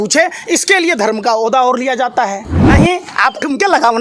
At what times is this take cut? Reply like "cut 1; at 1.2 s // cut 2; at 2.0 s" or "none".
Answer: cut 1; at 2.5 s